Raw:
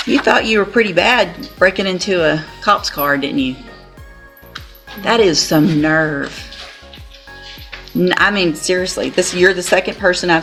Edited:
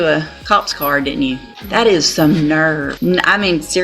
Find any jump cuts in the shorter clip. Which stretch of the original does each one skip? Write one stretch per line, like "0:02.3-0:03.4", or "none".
0:03.7-0:04.9
0:06.3-0:07.9